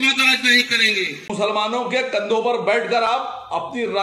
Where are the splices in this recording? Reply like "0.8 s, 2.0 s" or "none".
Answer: 1.3 s